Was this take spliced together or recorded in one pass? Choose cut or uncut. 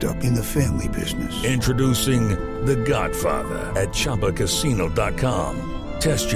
uncut